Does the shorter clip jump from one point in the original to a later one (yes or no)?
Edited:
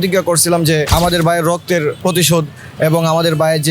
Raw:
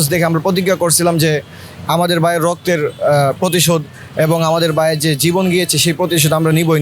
yes